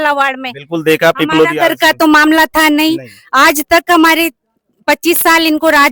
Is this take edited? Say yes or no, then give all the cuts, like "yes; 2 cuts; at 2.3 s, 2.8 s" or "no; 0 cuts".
no; 0 cuts